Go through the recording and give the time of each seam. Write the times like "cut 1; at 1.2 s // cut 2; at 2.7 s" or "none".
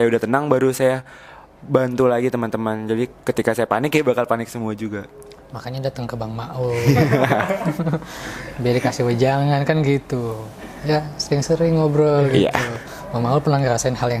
none

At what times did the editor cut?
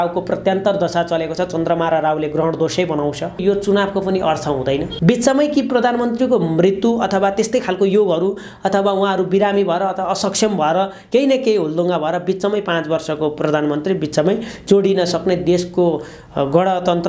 cut 1; at 3.4 s // cut 2; at 4.9 s

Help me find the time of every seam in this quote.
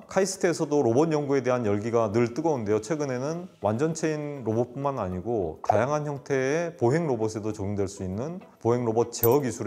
none

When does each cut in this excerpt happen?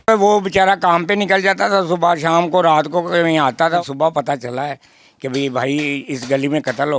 cut 1; at 3.8 s

